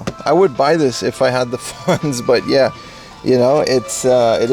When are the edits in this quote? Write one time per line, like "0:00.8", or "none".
none